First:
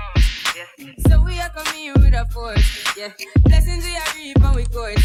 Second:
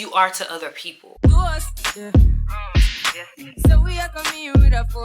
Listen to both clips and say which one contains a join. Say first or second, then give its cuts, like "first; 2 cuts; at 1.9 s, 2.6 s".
second; 1 cut; at 1.0 s